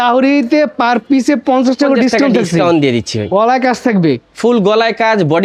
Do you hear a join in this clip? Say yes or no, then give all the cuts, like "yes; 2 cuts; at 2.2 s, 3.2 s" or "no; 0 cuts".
no; 0 cuts